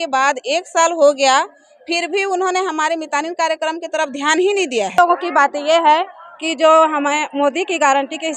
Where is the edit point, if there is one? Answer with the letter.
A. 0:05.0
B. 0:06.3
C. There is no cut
A